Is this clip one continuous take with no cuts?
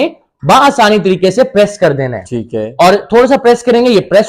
yes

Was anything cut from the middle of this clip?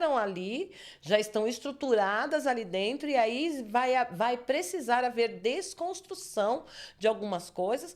no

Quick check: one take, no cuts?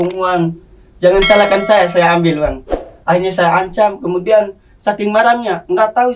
yes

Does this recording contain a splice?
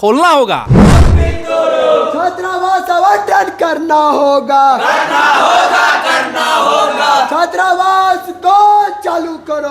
yes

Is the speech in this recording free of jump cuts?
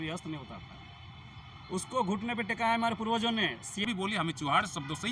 no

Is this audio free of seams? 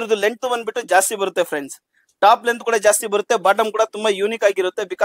yes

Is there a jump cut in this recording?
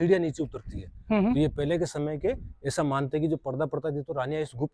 no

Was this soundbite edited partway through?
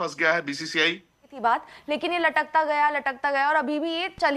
no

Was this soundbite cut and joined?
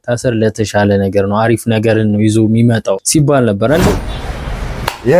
yes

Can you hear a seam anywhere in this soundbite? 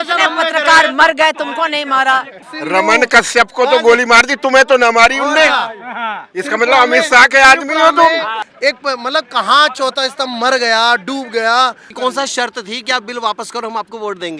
yes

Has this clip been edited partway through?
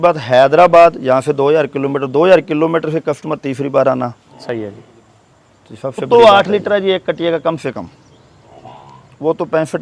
yes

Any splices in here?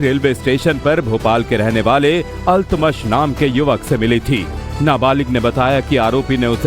yes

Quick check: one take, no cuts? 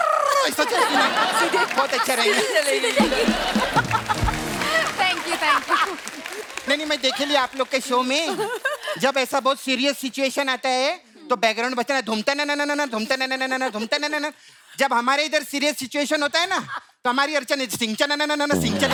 yes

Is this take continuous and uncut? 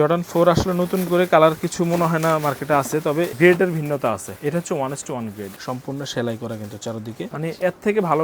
no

